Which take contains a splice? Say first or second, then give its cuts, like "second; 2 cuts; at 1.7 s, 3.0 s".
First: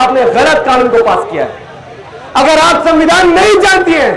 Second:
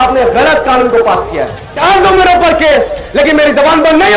second; 1 cut; at 1.6 s